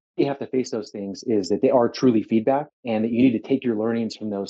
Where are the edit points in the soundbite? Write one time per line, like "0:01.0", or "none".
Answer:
0:02.8